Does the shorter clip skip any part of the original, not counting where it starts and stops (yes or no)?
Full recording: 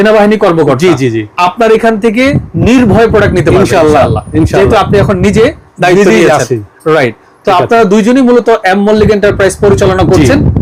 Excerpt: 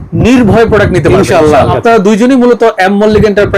yes